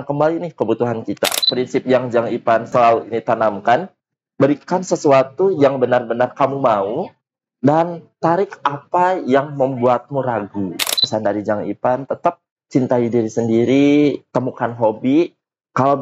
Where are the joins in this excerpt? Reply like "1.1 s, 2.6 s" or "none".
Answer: 1.5 s, 2.7 s, 11.0 s

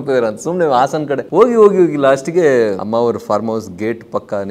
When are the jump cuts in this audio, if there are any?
1.2 s, 2.8 s

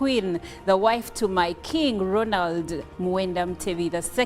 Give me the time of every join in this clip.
1.1 s, 2.5 s

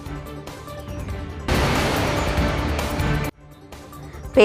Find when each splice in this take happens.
none

